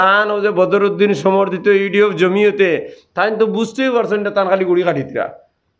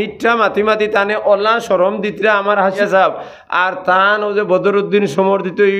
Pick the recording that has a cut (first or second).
second